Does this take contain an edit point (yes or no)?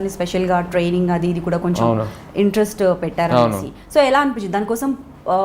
no